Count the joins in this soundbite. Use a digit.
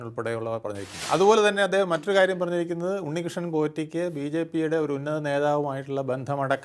1